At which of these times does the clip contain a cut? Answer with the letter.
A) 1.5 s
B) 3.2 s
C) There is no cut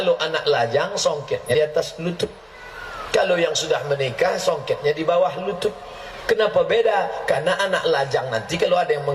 A